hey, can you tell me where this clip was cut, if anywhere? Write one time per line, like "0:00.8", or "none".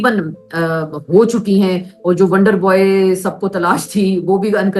none